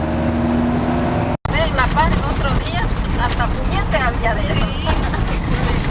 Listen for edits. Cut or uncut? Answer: uncut